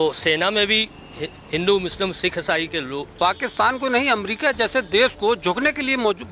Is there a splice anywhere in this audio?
yes; 1 cut; at 3.0 s

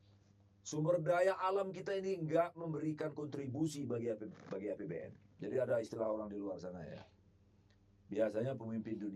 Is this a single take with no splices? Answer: no; 1 cut; at 5.2 s

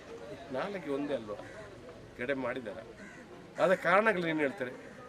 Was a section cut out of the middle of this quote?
no; 0 cuts

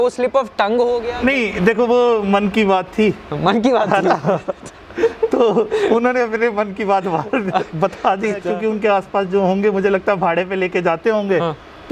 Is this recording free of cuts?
no; 2 cuts; at 1.1 s, 8.4 s

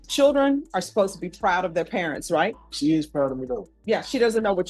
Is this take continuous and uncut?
no; 2 cuts; at 2.6 s, 3.7 s

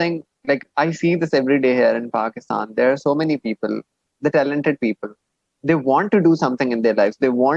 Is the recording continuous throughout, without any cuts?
yes; 0 cuts

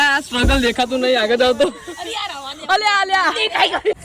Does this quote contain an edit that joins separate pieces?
no; 0 cuts

